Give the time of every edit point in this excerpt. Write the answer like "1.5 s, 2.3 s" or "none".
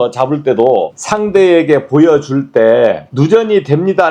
1.0 s, 3.1 s